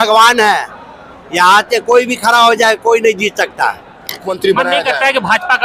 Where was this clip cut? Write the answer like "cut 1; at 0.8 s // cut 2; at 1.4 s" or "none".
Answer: cut 1; at 4.3 s